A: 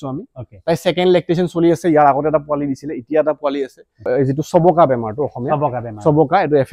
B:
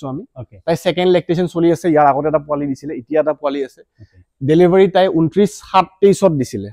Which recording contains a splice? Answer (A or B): A